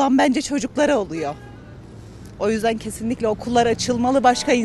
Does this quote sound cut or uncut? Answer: uncut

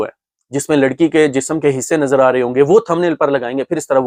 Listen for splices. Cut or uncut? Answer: uncut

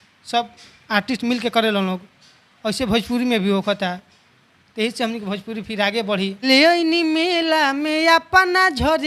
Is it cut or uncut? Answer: cut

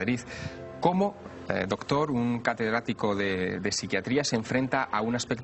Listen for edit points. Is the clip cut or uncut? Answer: cut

